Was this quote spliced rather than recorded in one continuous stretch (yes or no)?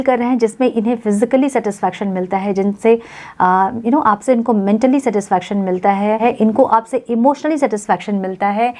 yes